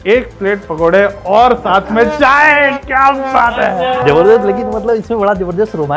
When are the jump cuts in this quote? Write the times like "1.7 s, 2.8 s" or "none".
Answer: 4.1 s